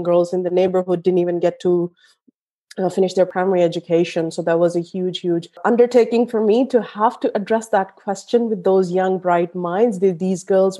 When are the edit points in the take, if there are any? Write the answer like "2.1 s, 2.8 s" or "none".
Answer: 3.3 s, 5.6 s